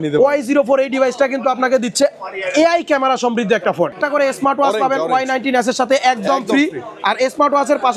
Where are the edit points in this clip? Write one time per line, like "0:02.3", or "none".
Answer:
0:03.9